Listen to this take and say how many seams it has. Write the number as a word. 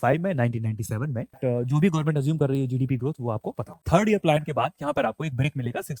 two